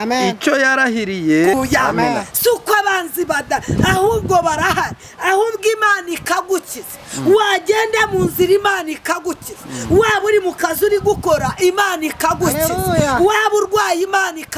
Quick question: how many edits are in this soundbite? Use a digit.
1